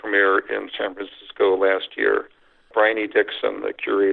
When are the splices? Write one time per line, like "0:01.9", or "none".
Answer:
0:02.7